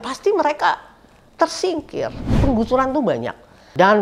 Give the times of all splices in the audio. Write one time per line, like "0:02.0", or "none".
0:02.4